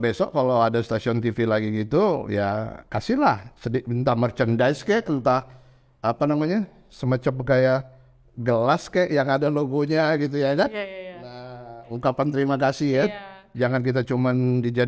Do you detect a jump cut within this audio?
no; 0 cuts

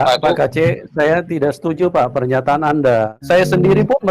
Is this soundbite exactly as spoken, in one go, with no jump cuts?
no; 1 cut; at 3.2 s

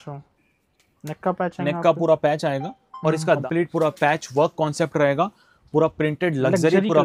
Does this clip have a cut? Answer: yes; 1 cut; at 3.2 s

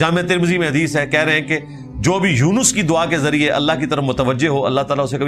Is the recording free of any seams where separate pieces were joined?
yes; 0 cuts

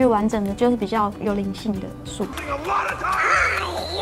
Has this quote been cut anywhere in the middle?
no; 0 cuts

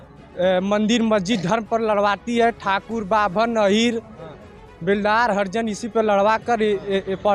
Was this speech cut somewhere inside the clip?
no; 0 cuts

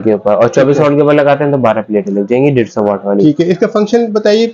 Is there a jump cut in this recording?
no; 0 cuts

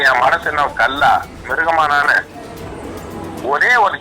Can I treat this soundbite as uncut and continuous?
no; 1 cut; at 2.6 s

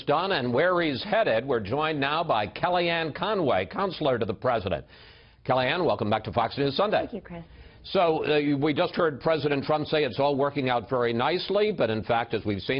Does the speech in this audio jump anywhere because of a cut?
no; 0 cuts

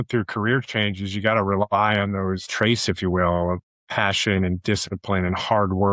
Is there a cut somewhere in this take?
yes; 2 cuts; at 2.4 s, 3.7 s

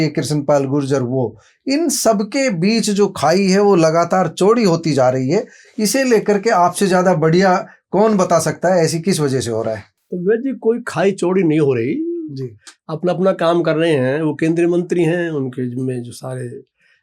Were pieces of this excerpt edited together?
no; 0 cuts

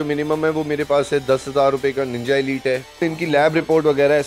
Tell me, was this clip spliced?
yes; 1 cut; at 3.0 s

